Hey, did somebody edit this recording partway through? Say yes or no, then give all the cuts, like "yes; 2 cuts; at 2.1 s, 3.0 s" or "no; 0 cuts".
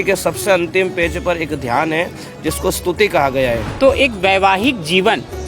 yes; 1 cut; at 3.7 s